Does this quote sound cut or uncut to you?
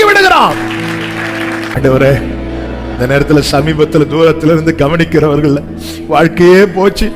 cut